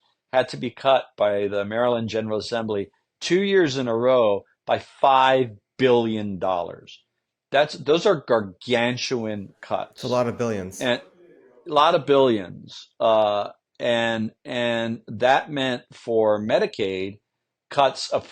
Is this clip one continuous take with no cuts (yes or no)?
yes